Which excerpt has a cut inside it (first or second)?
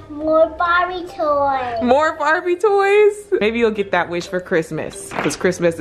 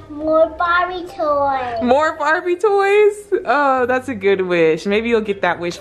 first